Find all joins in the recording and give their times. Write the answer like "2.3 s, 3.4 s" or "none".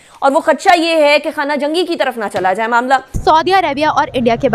3.2 s